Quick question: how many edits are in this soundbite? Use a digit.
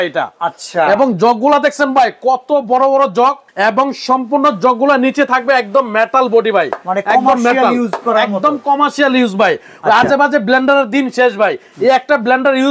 0